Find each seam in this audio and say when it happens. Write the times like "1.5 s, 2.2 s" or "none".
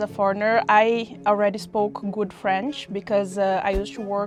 none